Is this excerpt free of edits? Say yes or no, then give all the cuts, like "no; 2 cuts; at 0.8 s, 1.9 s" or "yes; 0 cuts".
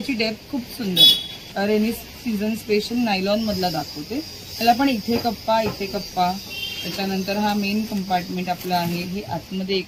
no; 1 cut; at 1.4 s